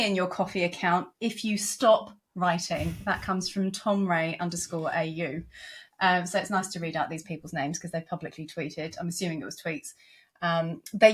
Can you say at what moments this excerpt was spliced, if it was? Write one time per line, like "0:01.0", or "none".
none